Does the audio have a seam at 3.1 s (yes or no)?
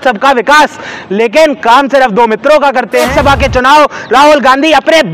yes